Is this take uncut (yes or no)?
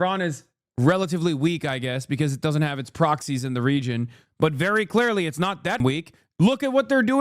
no